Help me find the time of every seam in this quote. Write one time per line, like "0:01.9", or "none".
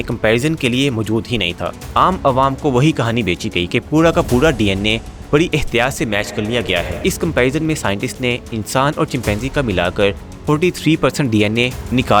0:01.6
0:06.9